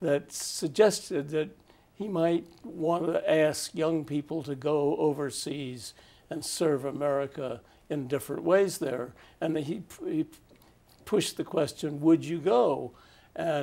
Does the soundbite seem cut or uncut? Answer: uncut